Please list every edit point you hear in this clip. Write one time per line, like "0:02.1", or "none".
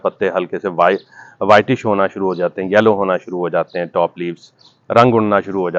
none